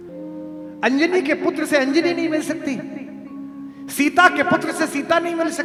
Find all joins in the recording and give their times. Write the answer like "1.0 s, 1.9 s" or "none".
none